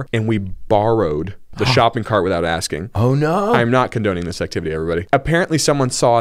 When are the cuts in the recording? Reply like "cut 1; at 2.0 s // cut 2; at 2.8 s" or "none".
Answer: none